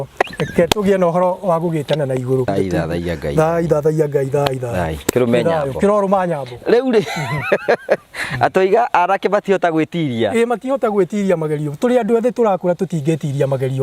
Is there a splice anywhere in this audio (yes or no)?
yes